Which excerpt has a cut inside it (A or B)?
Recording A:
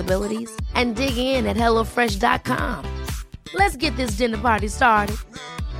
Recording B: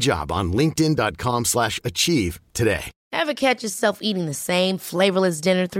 B